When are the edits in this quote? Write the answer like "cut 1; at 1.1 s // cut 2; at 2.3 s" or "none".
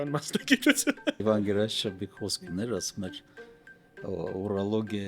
cut 1; at 1.2 s